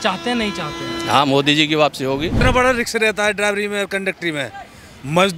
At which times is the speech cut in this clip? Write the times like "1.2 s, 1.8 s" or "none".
2.3 s